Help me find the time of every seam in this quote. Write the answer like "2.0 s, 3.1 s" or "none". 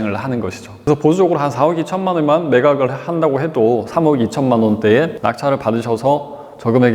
0.9 s, 5.2 s